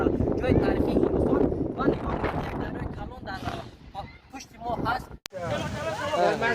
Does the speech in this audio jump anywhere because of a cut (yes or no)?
yes